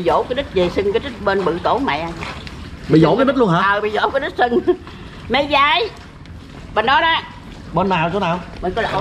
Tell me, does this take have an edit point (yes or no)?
no